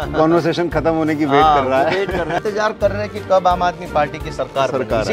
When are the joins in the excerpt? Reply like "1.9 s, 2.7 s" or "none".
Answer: 2.4 s